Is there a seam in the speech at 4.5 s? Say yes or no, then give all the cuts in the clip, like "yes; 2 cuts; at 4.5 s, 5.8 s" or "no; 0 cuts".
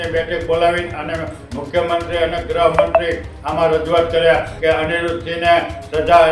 yes; 1 cut; at 4.5 s